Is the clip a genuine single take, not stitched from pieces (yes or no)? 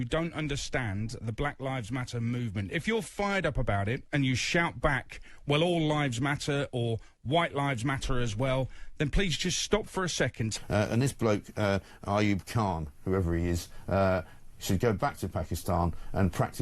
no